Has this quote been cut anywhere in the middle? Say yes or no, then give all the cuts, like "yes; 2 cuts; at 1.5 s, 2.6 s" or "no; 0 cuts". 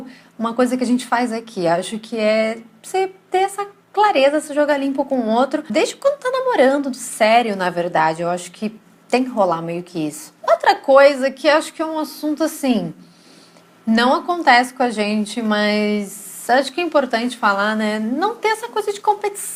no; 0 cuts